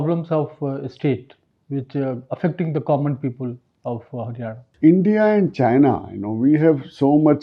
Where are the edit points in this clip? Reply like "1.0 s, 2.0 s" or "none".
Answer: 4.7 s

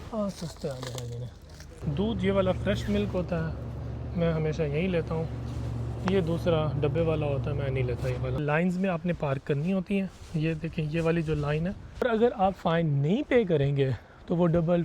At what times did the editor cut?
1.7 s, 8.4 s, 12.0 s

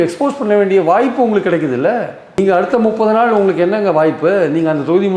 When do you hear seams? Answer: none

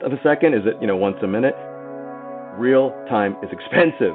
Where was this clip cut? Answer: 2.1 s

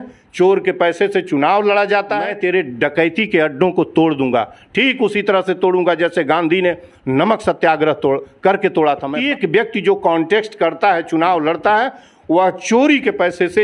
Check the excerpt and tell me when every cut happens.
2.3 s, 9.2 s

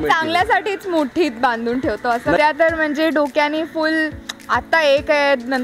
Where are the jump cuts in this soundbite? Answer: 2.4 s

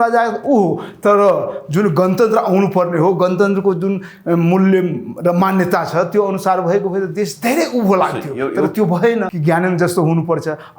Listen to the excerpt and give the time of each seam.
9.3 s

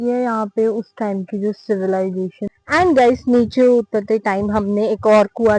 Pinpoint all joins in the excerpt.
2.5 s

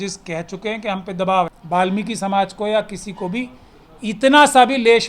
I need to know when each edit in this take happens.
1.5 s

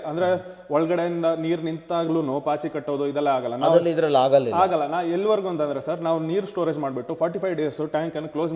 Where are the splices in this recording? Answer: none

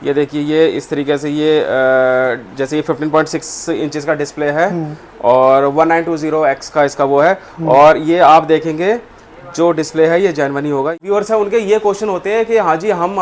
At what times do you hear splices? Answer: 11.0 s

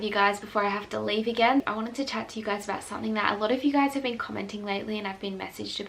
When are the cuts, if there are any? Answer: 1.7 s

